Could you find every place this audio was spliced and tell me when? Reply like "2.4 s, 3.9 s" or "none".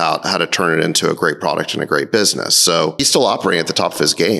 3.0 s